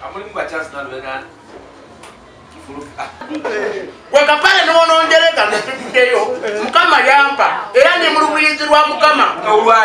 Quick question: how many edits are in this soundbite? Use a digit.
1